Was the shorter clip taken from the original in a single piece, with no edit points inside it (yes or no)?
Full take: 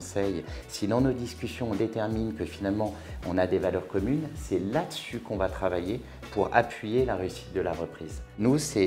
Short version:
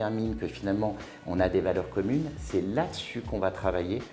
yes